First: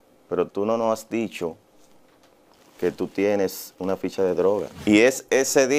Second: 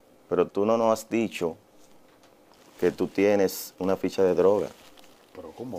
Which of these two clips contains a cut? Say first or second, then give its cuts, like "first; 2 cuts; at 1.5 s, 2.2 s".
first; 1 cut; at 4.7 s